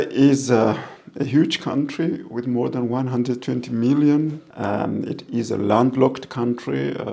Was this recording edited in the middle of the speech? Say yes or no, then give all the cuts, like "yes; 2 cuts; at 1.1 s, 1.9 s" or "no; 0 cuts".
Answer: yes; 1 cut; at 4.5 s